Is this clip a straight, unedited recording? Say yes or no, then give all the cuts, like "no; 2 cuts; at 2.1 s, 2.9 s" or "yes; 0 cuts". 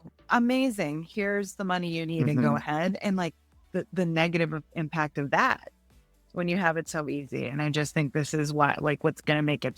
yes; 0 cuts